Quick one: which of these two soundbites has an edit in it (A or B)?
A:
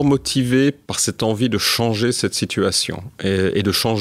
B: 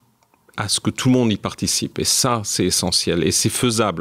A